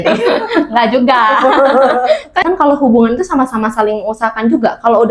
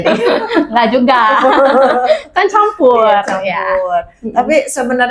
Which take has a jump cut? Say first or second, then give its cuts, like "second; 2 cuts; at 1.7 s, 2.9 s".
first; 1 cut; at 2.4 s